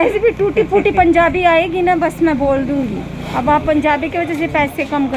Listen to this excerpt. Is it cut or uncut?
uncut